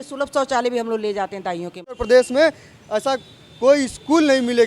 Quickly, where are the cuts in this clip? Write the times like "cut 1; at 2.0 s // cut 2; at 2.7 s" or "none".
cut 1; at 2.0 s